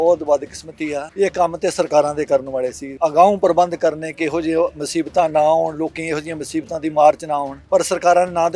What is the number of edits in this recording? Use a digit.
3